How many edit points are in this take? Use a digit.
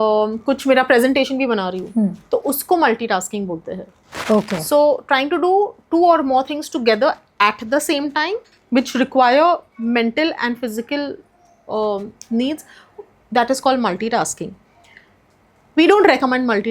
0